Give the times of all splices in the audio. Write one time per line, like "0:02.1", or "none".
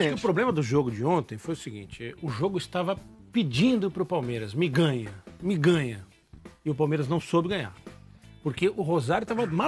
none